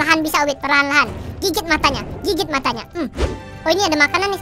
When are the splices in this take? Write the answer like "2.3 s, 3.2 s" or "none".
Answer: 3.5 s